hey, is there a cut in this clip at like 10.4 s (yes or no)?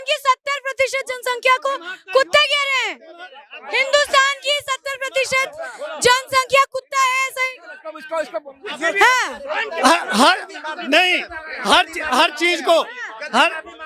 no